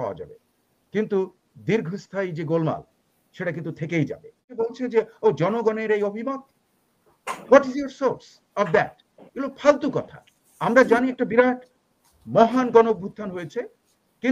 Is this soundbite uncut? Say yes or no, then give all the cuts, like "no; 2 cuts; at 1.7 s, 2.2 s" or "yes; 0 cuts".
no; 1 cut; at 4.6 s